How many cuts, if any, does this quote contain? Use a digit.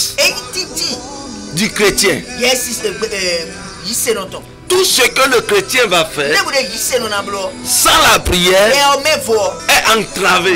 2